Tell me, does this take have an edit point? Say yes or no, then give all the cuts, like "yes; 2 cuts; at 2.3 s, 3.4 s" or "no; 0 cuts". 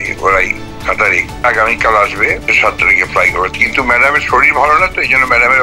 yes; 2 cuts; at 1.4 s, 2.5 s